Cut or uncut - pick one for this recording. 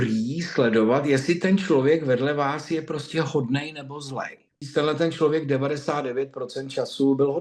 cut